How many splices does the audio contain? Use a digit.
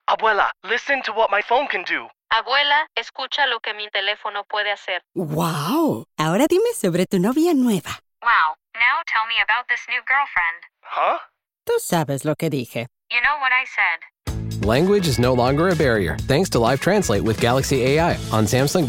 0